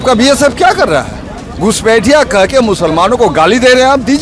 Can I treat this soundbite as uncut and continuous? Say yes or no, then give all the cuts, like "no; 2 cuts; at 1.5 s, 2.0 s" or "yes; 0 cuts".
yes; 0 cuts